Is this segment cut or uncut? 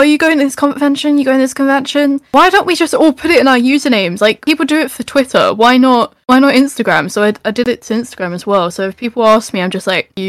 uncut